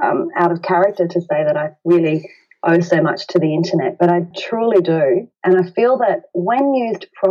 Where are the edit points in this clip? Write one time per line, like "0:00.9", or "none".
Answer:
0:04.4
0:05.3